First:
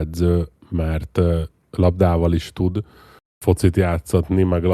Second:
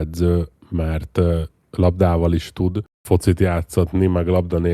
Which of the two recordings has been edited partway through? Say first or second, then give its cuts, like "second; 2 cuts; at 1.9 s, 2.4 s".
second; 1 cut; at 2.9 s